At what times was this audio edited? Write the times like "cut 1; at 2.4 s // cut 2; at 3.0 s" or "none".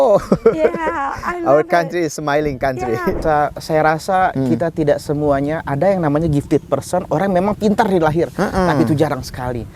cut 1; at 3.2 s